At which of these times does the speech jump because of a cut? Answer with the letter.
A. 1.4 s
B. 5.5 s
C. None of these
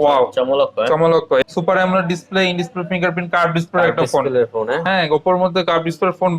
A